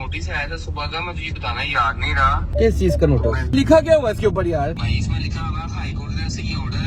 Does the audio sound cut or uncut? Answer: cut